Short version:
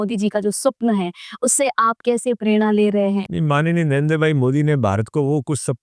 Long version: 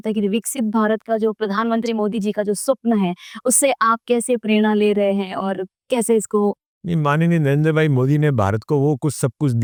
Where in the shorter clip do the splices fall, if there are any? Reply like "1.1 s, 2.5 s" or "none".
3.3 s